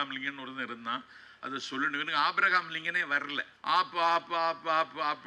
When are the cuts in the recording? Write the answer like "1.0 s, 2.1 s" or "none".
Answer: 3.5 s